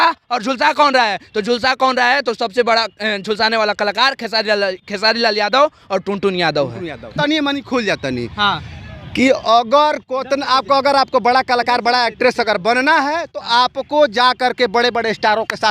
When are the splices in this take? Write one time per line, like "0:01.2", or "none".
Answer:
0:07.1